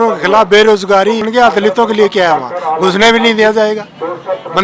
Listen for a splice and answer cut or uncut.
cut